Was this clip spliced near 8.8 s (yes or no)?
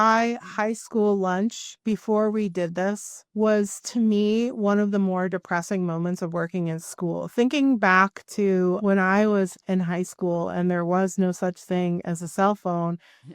yes